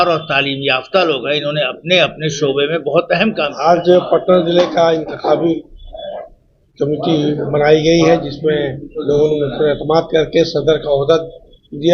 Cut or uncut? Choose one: cut